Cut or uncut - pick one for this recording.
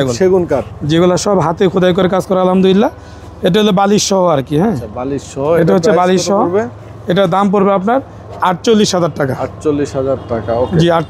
uncut